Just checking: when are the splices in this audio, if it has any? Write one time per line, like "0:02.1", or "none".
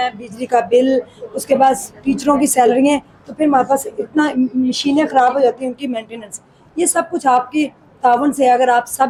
none